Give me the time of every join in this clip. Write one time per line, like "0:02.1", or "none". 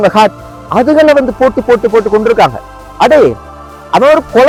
none